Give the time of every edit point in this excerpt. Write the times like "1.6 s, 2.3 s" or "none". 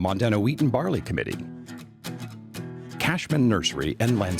1.4 s, 3.0 s